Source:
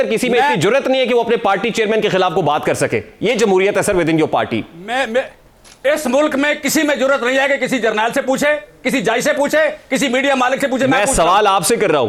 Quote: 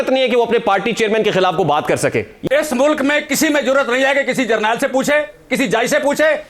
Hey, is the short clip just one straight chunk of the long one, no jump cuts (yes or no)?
no